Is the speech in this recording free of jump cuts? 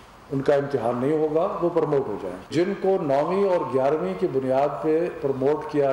no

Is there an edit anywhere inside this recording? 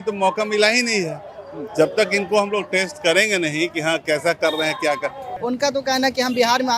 yes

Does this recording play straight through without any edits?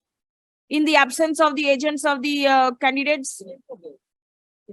yes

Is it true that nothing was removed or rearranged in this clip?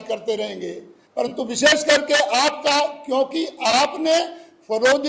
no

